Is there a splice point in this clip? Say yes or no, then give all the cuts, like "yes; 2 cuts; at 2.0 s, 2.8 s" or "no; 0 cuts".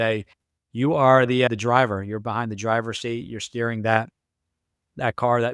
no; 0 cuts